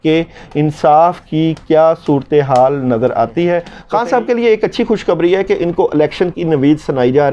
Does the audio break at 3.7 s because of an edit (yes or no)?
yes